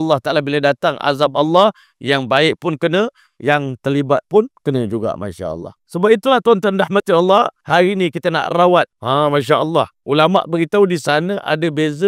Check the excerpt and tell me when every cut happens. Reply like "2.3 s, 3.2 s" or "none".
5.7 s, 7.6 s, 9.0 s, 10.0 s